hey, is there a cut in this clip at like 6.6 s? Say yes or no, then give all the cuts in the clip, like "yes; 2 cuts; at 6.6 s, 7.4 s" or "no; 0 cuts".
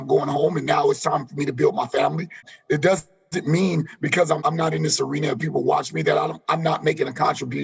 no; 2 cuts; at 2.5 s, 4.4 s